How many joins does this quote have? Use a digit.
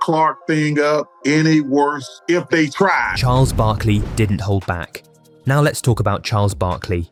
0